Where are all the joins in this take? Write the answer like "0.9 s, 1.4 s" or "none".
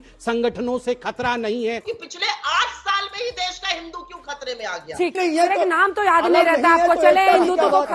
1.8 s, 5.2 s